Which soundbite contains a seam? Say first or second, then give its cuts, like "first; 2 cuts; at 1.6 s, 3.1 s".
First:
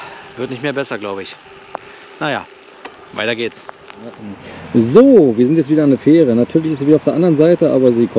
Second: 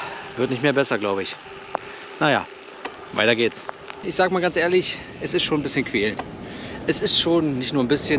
second; 1 cut; at 4.0 s